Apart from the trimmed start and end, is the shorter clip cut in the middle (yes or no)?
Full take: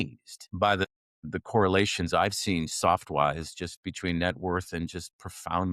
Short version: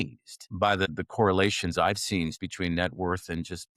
yes